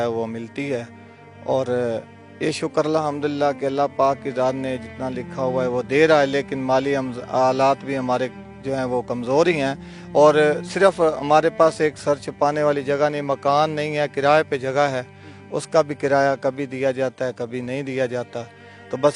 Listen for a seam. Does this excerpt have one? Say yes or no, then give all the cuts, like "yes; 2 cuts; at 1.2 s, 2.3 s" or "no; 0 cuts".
no; 0 cuts